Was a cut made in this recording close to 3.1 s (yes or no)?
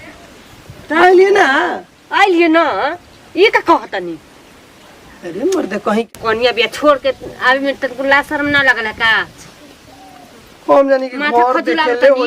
no